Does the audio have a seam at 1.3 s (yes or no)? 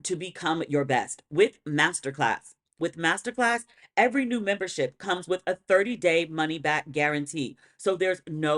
no